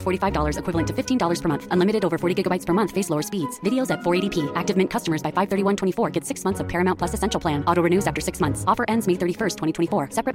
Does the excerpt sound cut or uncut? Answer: uncut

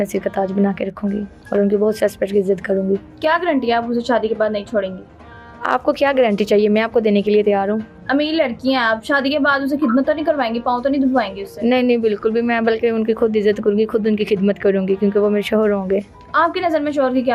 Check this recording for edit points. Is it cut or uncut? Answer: uncut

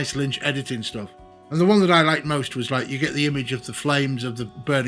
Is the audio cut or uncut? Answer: cut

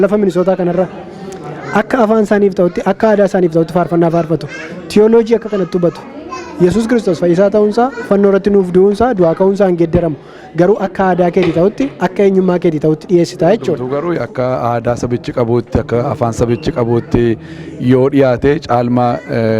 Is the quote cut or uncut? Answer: cut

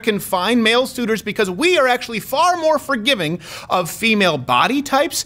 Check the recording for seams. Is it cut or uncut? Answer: uncut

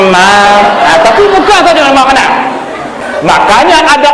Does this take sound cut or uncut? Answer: cut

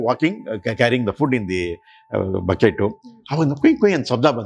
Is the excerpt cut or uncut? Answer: uncut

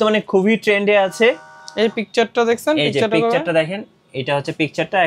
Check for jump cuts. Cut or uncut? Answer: uncut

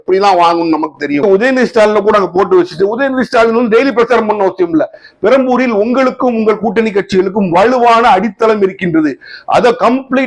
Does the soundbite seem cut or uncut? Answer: cut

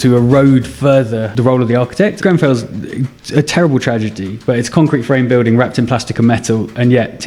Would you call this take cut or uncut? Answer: cut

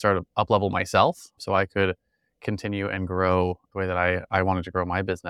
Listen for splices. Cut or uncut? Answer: uncut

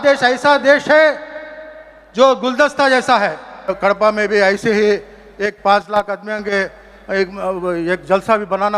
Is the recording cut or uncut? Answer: cut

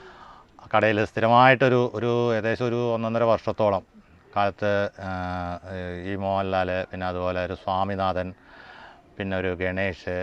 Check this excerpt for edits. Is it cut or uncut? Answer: uncut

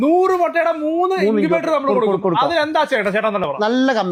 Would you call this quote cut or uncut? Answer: uncut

